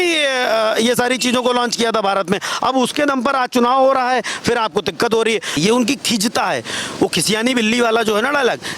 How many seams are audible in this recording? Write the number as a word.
one